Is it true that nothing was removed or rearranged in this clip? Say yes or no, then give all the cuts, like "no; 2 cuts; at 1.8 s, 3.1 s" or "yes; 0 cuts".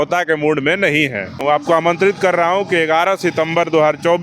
no; 1 cut; at 1.4 s